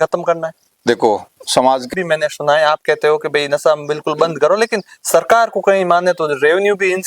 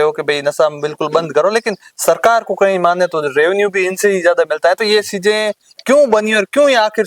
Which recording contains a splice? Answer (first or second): first